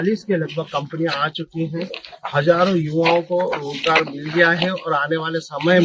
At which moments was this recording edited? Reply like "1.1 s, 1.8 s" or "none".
none

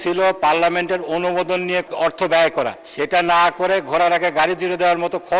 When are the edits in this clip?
1.9 s, 2.8 s

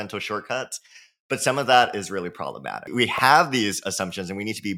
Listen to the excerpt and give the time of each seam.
2.9 s

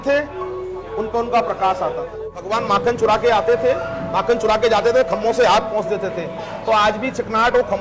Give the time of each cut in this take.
2.5 s

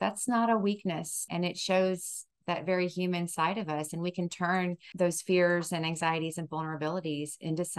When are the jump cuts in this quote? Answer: 1.2 s, 4.9 s

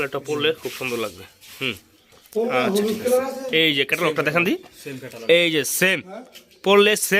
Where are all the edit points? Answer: none

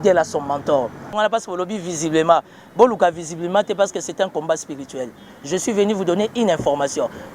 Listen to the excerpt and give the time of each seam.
1.1 s

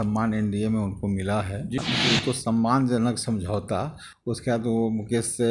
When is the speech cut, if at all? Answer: 1.8 s

